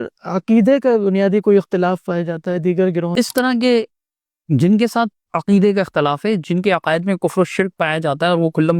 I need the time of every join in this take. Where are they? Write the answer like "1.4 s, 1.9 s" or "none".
3.1 s

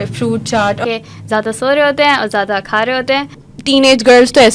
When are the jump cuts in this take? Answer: 0.8 s, 3.4 s

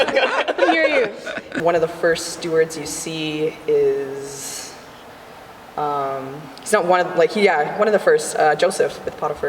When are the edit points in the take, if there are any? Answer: 1.5 s

